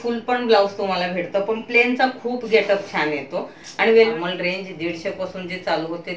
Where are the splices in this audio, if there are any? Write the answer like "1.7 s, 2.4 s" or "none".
4.1 s